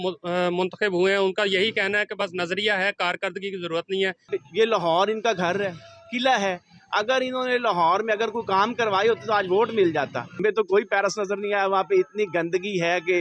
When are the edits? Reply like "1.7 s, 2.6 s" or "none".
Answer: 4.3 s, 10.3 s